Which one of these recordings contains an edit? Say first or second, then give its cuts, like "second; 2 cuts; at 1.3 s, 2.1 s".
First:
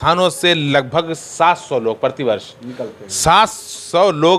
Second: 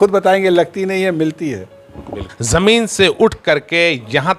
second; 1 cut; at 2.3 s